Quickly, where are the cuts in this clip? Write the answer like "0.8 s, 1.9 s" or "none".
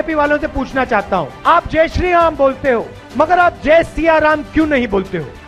none